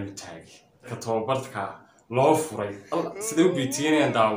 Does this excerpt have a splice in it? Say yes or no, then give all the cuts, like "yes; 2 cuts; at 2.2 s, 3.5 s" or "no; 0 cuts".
yes; 1 cut; at 1.0 s